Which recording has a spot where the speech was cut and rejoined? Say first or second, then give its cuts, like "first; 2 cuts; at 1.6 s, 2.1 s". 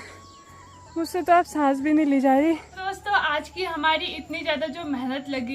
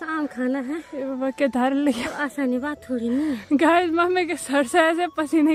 first; 1 cut; at 2.7 s